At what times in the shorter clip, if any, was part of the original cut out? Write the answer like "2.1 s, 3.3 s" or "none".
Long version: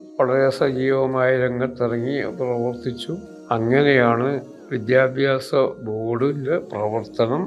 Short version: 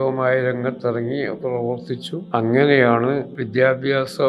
2.1 s, 3.3 s